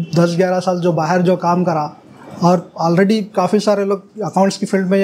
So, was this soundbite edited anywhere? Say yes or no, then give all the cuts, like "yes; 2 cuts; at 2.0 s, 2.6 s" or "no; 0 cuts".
no; 0 cuts